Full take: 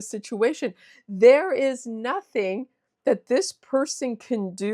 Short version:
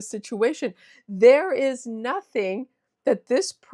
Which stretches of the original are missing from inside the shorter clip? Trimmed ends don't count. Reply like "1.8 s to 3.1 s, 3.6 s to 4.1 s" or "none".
none

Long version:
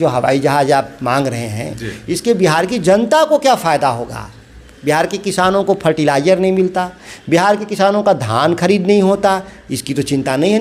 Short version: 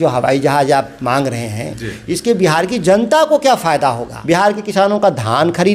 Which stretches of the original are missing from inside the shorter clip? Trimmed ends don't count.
4.1 s to 7.1 s

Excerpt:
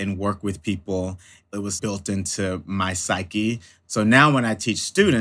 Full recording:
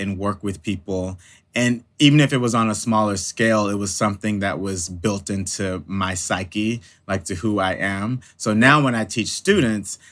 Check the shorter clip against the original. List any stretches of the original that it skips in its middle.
1.5 s to 4.7 s, 7.0 s to 8.2 s

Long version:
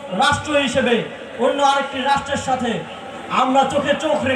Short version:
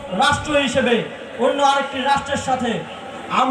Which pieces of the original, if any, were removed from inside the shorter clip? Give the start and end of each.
none

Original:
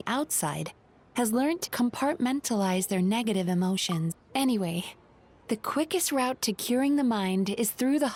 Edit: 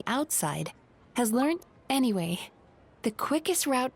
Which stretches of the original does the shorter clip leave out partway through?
1.7 s to 4.1 s

